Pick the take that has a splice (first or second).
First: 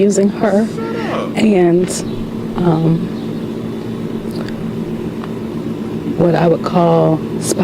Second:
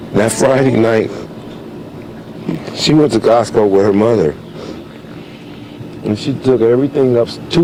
first